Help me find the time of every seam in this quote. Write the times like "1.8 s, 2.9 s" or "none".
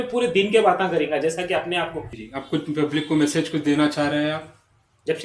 2.2 s